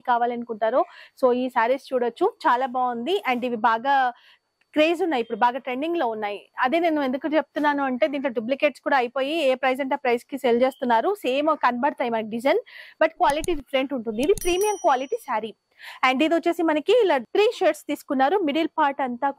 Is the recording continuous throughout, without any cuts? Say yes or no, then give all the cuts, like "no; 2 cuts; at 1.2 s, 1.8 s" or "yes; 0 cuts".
yes; 0 cuts